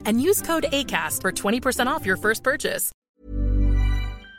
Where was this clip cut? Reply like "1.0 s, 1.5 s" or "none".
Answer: 3.0 s